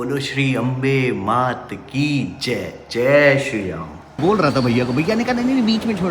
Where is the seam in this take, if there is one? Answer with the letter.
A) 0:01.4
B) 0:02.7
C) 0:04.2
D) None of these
C